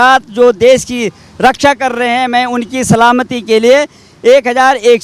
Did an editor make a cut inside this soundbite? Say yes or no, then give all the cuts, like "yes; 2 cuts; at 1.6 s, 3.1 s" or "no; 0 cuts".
no; 0 cuts